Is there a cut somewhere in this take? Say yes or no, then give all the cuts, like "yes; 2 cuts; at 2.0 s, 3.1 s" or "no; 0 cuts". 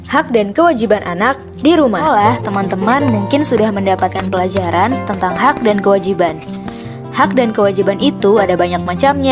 yes; 1 cut; at 2.0 s